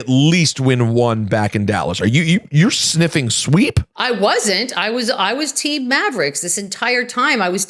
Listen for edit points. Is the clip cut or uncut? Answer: uncut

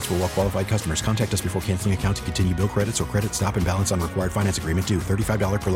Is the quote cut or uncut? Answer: uncut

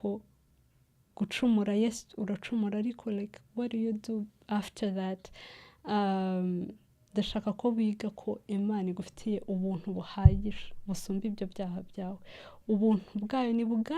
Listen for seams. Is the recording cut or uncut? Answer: uncut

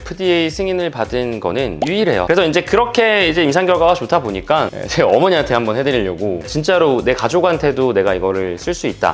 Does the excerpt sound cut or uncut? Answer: cut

